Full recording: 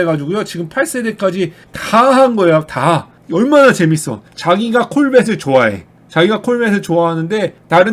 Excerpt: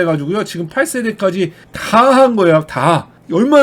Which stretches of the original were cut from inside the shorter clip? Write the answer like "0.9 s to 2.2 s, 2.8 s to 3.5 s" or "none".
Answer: none